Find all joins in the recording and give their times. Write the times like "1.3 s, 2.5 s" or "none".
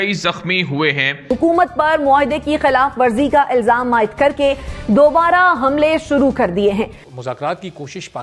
1.2 s, 7.0 s